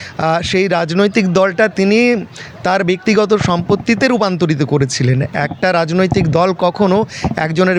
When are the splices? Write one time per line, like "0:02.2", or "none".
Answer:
none

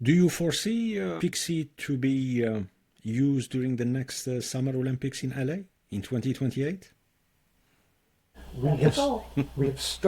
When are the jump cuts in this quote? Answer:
0:01.2

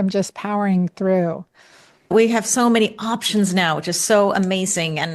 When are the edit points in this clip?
0:02.1

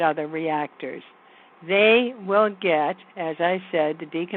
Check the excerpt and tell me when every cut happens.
none

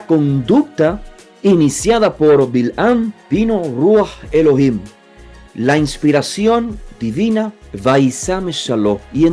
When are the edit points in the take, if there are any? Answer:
0:03.2
0:07.6

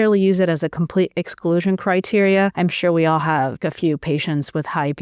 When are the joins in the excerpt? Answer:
0:02.5
0:03.6

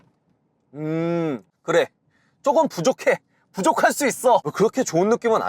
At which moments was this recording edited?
0:04.5

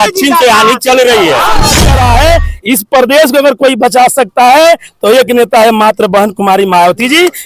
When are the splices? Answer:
0:01.8

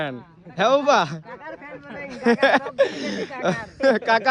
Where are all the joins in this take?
none

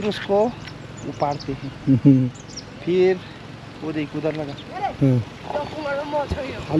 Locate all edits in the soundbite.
none

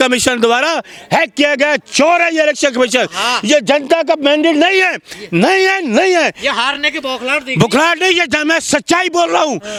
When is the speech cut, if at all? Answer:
none

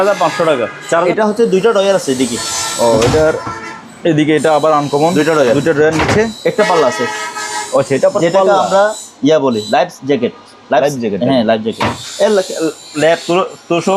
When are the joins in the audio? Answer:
0:01.0

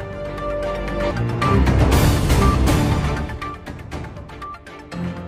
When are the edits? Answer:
0:01.1

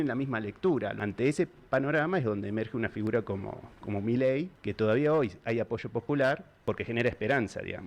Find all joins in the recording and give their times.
0:01.0
0:04.6
0:06.5

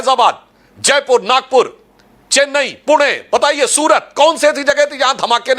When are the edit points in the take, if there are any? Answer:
none

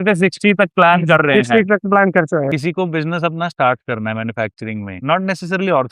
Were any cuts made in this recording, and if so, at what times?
0:02.5

